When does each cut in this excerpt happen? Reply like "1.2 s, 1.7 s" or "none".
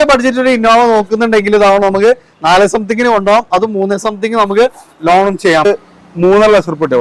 5.7 s